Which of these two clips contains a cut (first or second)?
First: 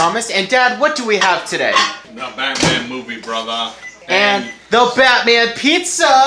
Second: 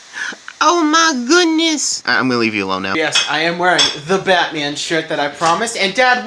second